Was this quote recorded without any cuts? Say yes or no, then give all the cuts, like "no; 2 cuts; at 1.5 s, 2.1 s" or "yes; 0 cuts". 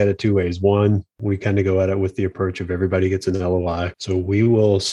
no; 2 cuts; at 1.2 s, 4.0 s